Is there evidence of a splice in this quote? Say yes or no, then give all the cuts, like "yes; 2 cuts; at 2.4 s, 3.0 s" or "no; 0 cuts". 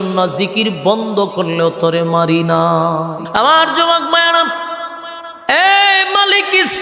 yes; 1 cut; at 3.2 s